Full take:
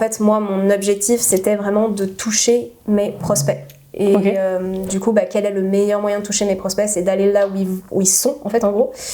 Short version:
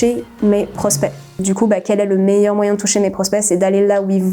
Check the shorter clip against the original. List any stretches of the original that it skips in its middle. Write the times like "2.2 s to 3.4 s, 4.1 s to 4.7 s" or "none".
3.8 s to 4.8 s